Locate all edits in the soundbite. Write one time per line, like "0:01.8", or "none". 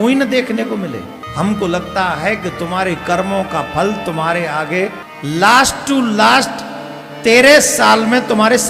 0:01.2
0:05.1